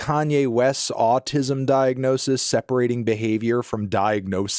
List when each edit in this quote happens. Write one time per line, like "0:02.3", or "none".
none